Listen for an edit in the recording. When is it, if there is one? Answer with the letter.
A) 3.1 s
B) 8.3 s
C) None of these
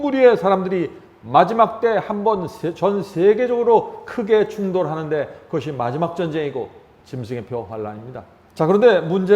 B